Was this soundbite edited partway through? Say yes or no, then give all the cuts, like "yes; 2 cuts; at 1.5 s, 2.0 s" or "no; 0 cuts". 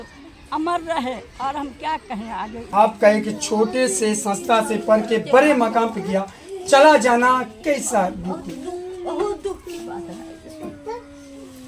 yes; 1 cut; at 2.7 s